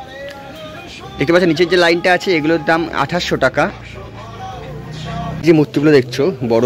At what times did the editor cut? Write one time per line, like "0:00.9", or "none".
0:05.4